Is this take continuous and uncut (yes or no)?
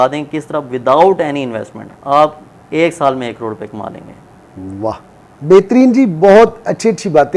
yes